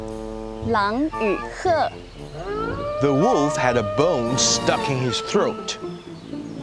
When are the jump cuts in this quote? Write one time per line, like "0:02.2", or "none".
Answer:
none